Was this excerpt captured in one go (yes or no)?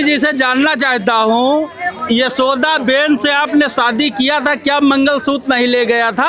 yes